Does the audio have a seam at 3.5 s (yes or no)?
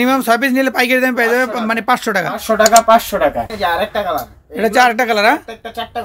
yes